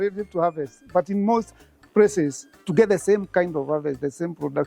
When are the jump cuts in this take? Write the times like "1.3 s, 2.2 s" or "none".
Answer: none